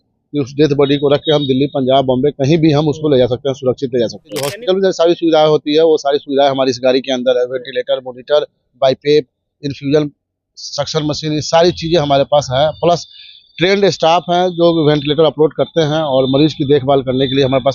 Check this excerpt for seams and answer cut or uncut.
cut